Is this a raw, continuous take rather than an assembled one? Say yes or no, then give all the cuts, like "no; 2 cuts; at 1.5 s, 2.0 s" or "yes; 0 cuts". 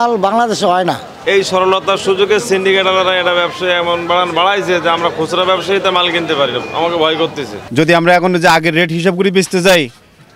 no; 2 cuts; at 1.1 s, 7.6 s